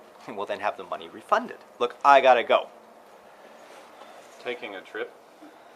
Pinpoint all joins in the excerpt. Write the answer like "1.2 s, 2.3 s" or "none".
1.6 s